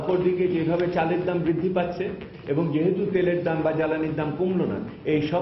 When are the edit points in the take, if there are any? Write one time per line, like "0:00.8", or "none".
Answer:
0:02.3